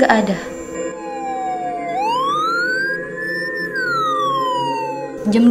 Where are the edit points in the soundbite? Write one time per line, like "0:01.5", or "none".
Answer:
0:01.1